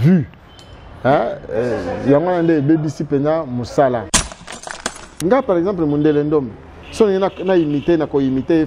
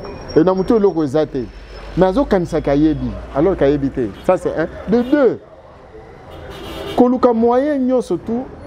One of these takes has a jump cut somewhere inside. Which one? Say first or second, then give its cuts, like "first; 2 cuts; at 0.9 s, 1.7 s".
first; 1 cut; at 4.6 s